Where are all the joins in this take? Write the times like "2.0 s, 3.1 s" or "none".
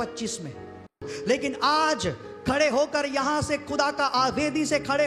none